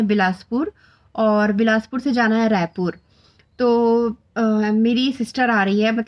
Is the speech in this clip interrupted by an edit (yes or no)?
no